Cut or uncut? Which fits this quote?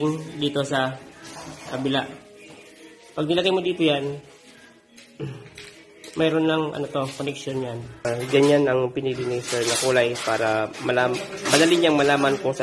cut